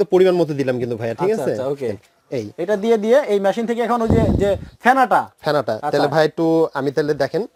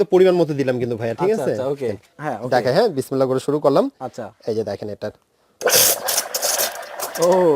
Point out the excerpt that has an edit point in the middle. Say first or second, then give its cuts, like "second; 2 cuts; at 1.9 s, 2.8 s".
second; 1 cut; at 2.2 s